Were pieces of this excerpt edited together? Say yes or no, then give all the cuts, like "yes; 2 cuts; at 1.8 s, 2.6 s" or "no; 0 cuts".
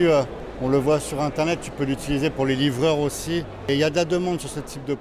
no; 0 cuts